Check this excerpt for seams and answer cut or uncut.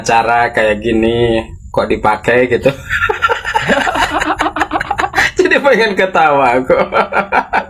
uncut